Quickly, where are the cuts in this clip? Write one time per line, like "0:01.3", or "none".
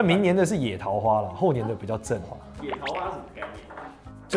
none